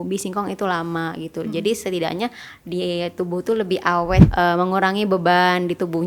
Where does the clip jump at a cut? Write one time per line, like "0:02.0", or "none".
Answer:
0:04.3

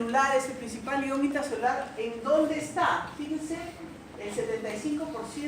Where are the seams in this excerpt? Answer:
0:03.3

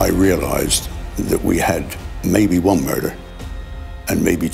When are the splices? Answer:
0:02.0

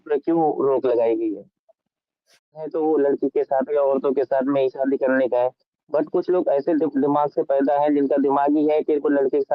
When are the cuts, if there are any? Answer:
0:02.7

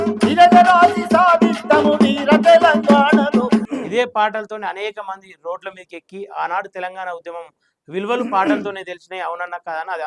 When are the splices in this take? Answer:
0:03.7

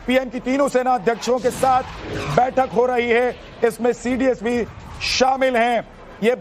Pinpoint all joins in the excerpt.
0:01.0

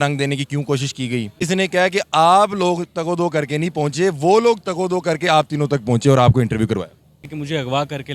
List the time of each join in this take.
0:01.4
0:07.3

